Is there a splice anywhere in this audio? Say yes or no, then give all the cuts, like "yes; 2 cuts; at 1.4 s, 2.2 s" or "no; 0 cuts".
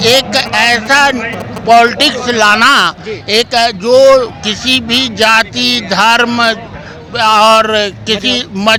no; 0 cuts